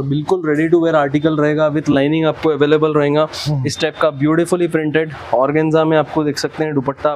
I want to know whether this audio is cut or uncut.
uncut